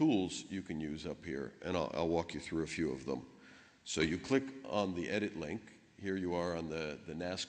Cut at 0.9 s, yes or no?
yes